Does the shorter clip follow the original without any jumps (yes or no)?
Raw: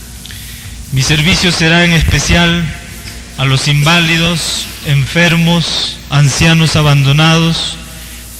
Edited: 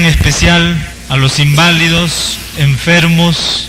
no